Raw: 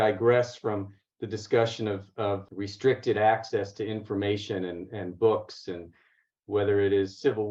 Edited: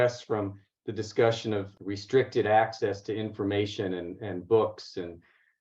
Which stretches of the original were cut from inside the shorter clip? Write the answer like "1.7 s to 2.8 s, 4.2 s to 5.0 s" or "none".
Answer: 2.1 s to 2.5 s